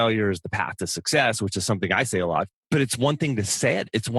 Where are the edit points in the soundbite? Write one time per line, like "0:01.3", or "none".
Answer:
0:02.5